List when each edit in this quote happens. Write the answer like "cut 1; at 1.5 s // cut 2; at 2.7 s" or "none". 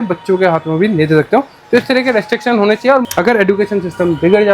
cut 1; at 3.0 s